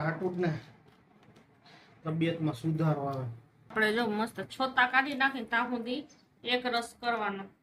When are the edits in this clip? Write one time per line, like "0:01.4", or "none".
0:03.7